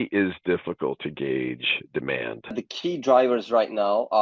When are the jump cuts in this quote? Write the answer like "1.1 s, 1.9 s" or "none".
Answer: 2.6 s